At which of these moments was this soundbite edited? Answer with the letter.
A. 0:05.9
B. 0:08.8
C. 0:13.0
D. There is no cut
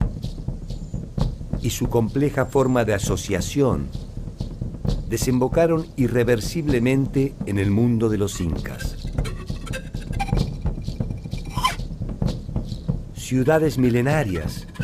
D